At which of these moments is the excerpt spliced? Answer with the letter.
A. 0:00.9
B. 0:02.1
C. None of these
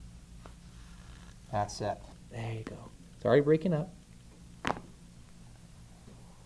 B